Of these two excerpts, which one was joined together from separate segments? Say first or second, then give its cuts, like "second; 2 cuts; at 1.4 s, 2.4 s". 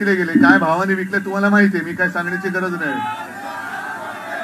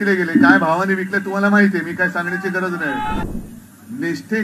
second; 1 cut; at 3.3 s